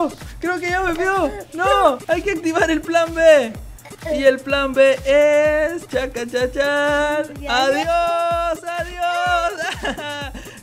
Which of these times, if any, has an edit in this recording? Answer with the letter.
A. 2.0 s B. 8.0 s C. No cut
A